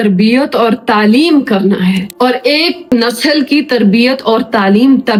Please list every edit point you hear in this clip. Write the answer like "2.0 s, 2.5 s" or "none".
none